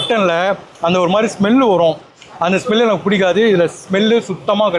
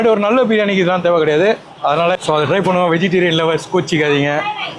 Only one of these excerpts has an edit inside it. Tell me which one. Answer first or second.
second